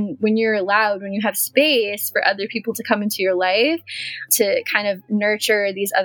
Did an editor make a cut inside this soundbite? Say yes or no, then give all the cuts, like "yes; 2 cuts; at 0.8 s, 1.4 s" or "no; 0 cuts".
yes; 1 cut; at 4.3 s